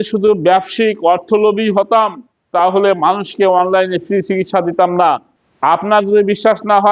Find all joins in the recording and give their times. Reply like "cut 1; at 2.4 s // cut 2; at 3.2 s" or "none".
none

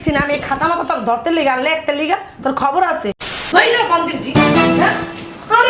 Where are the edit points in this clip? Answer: cut 1; at 3.3 s

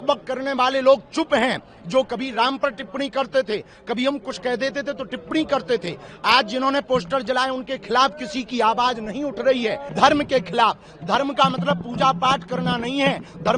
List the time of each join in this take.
cut 1; at 9.8 s

